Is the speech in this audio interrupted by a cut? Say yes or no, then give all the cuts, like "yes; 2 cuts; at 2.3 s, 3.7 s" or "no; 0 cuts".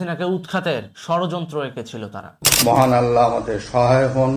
yes; 1 cut; at 2.4 s